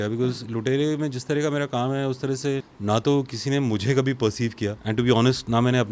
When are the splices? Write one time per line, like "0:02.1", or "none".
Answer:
0:02.7
0:04.8